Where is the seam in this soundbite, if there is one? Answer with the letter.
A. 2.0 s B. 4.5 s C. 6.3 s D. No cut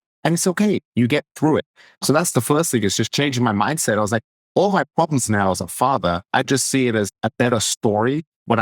A